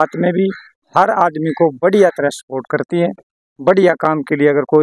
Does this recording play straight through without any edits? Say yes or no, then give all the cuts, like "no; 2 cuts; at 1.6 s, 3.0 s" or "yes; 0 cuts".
yes; 0 cuts